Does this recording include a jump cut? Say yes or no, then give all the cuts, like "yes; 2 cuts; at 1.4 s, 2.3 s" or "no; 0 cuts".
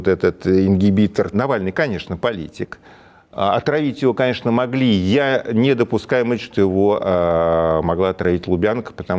yes; 1 cut; at 1.3 s